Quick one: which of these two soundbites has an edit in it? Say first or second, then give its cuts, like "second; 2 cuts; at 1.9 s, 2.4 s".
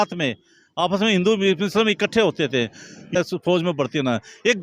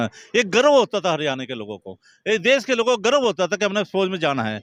first; 1 cut; at 3.1 s